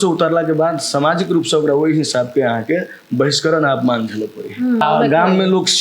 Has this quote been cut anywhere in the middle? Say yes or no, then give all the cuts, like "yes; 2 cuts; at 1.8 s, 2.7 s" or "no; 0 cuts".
yes; 1 cut; at 4.8 s